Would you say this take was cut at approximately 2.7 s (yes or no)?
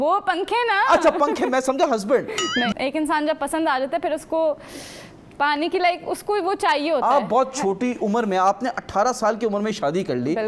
yes